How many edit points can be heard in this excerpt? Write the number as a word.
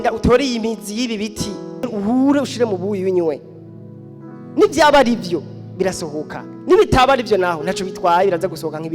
one